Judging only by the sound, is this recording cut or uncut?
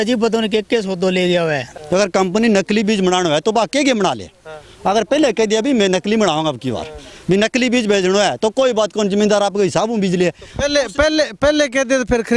cut